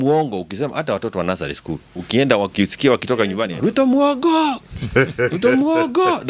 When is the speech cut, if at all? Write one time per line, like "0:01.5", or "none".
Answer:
0:03.5